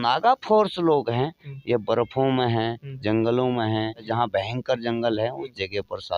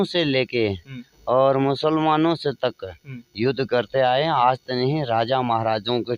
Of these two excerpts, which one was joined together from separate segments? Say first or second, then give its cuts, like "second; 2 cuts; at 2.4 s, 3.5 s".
first; 1 cut; at 4.1 s